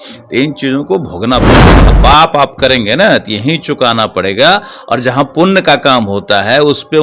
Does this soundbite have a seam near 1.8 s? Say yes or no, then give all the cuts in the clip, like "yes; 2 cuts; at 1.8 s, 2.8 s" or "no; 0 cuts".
yes; 1 cut; at 1.8 s